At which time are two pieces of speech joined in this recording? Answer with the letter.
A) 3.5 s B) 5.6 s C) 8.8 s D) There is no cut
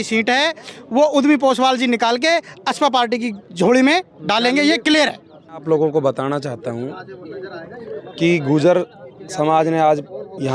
B